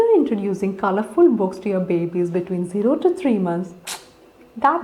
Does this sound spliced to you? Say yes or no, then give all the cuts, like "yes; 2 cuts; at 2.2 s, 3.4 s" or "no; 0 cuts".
no; 0 cuts